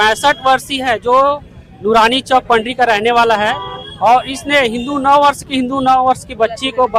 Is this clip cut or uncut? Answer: uncut